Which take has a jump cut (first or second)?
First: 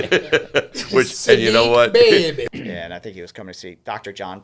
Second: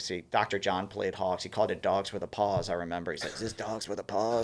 first